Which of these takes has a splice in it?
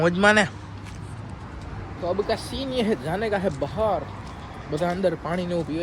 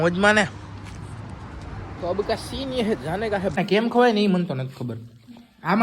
second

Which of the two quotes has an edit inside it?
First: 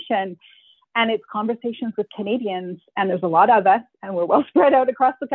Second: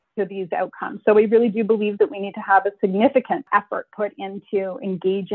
second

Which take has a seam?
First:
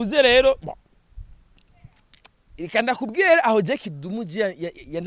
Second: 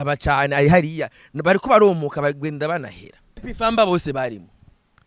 second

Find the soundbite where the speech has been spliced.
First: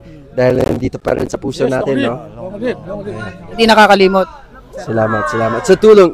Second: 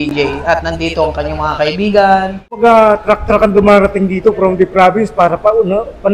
second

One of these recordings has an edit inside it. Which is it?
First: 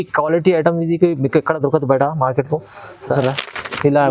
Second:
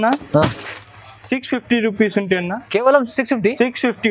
first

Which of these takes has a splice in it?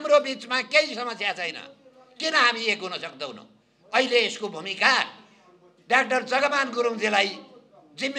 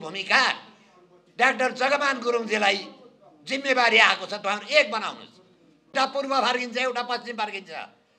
second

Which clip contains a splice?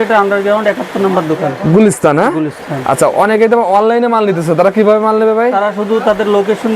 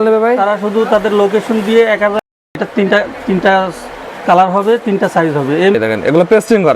second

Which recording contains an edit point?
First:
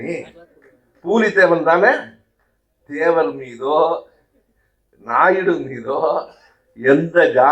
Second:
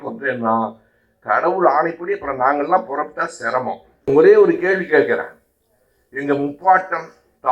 second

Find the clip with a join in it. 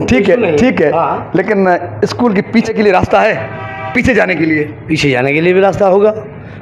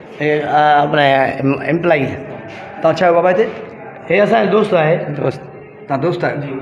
first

